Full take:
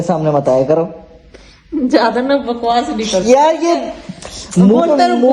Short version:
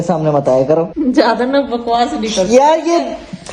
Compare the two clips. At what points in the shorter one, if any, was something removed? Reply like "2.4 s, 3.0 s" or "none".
0.9 s